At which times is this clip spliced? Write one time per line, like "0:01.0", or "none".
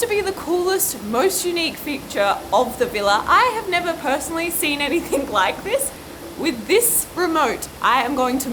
none